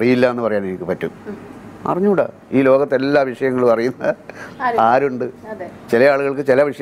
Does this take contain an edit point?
no; 0 cuts

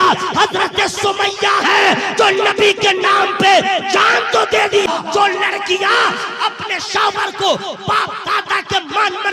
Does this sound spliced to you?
yes; 1 cut; at 4.9 s

